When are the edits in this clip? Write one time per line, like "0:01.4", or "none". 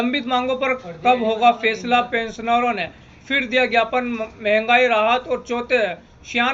none

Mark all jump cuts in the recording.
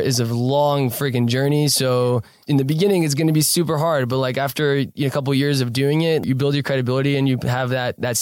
0:02.4
0:06.2

